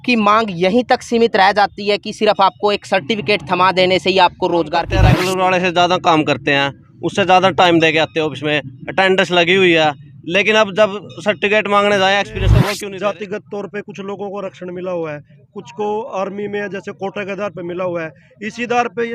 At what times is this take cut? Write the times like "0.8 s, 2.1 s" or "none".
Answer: 5.0 s, 12.5 s